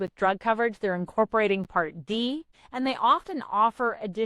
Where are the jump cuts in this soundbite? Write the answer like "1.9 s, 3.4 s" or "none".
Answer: 2.6 s